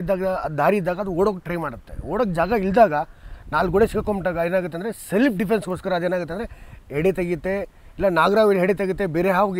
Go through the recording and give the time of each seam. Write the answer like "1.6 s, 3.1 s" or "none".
none